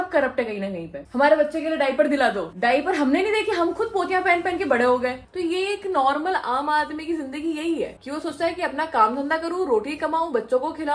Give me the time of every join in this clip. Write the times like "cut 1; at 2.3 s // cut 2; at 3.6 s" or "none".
cut 1; at 1.0 s // cut 2; at 5.2 s